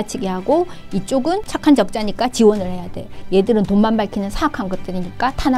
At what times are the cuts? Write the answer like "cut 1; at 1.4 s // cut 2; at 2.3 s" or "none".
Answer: cut 1; at 1.5 s